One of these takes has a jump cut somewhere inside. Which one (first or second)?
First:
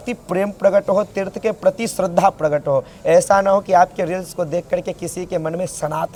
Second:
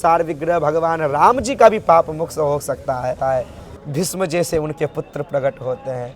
second